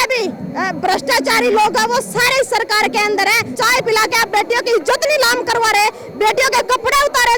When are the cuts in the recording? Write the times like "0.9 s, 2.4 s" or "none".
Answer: 3.6 s